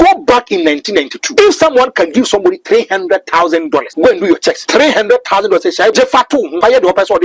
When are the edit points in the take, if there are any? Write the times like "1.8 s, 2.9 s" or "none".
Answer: 1.2 s, 3.9 s, 4.6 s, 6.3 s